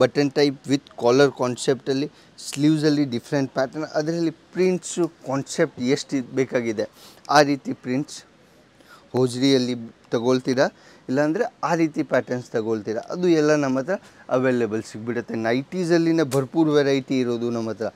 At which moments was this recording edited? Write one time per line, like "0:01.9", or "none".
none